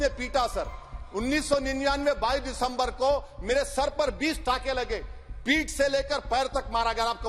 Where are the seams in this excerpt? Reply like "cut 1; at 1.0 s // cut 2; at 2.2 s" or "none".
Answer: none